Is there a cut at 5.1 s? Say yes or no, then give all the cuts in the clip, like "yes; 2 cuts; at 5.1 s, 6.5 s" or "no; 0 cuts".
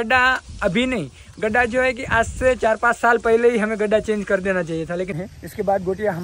yes; 1 cut; at 5.1 s